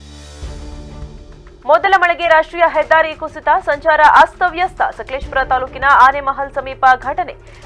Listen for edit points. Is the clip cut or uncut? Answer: uncut